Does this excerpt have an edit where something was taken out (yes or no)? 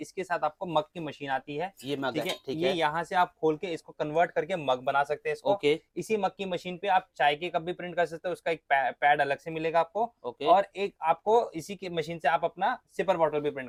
no